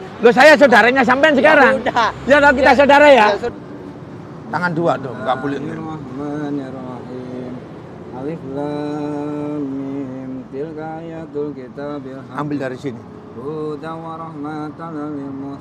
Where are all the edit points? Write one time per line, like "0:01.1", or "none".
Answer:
0:03.5